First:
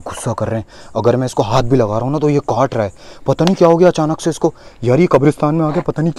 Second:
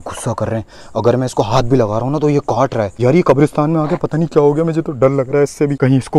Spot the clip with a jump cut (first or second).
second